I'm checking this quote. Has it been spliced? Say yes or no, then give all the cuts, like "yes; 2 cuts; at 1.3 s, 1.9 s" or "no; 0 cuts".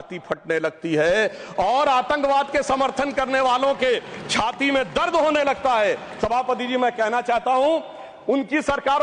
no; 0 cuts